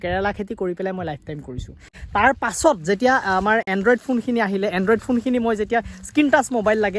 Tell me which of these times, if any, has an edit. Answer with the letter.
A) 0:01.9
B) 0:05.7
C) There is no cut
A